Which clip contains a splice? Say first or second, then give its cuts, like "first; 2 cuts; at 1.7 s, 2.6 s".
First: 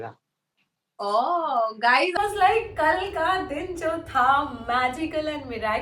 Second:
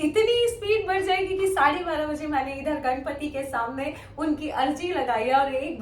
first; 1 cut; at 2.2 s